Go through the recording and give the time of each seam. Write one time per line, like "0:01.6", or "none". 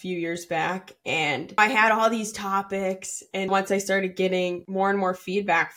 0:01.6
0:03.5
0:04.6